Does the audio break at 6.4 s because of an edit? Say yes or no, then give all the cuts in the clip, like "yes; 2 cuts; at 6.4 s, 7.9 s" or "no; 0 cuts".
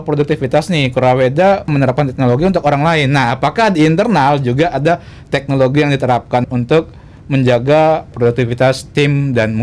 yes; 3 cuts; at 1.7 s, 6.4 s, 8.1 s